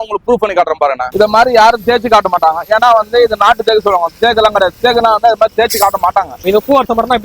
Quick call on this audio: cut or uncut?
cut